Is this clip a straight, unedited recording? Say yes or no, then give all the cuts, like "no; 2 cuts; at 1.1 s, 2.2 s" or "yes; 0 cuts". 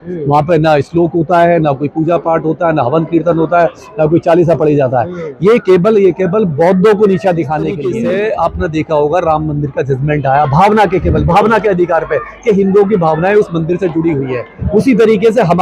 no; 1 cut; at 7.8 s